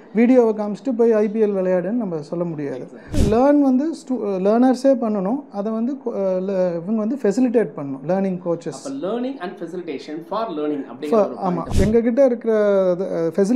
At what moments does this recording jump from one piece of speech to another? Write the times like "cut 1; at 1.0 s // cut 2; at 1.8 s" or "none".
cut 1; at 3.1 s // cut 2; at 11.7 s